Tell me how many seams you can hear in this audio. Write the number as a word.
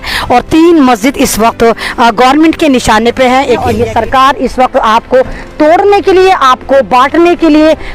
one